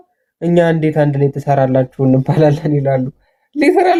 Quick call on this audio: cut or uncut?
uncut